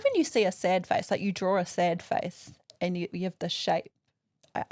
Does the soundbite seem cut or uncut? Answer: uncut